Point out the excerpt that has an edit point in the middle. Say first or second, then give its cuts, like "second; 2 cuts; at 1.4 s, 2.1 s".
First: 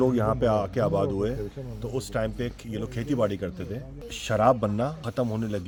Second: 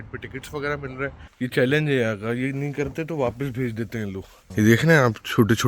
second; 2 cuts; at 1.2 s, 4.5 s